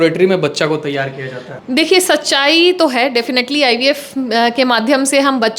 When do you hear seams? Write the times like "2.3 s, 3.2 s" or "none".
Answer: none